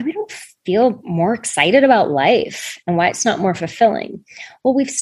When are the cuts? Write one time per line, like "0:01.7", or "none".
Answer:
0:01.0